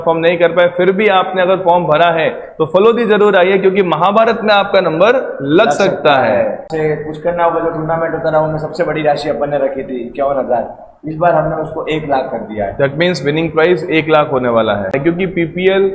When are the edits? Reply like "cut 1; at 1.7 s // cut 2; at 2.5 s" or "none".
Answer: cut 1; at 6.7 s // cut 2; at 14.9 s